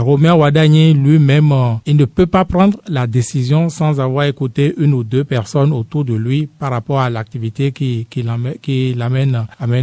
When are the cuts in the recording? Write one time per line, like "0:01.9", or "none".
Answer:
none